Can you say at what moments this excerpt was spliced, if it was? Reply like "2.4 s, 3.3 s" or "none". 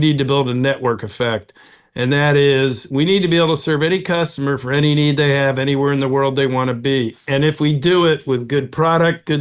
none